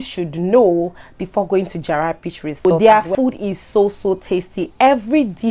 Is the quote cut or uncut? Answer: cut